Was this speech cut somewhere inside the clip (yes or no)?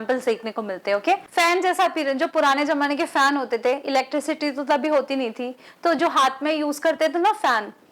yes